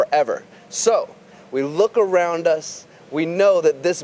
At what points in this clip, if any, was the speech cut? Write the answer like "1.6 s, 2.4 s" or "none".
1.3 s